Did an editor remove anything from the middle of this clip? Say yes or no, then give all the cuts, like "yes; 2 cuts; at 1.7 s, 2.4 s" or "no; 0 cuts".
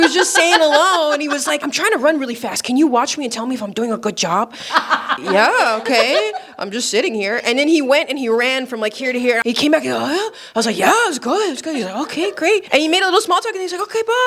yes; 4 cuts; at 1.7 s, 5.1 s, 9.4 s, 12.7 s